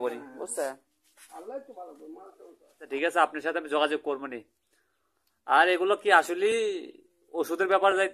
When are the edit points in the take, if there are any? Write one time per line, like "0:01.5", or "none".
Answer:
0:02.9